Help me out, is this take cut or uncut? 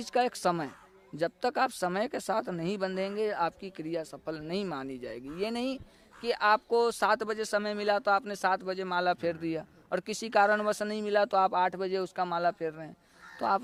uncut